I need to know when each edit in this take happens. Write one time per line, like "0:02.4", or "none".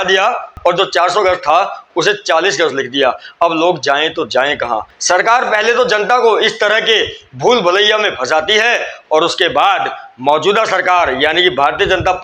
0:04.9